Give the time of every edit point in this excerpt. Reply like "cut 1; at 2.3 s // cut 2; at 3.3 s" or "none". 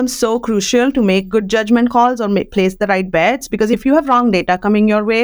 cut 1; at 3.8 s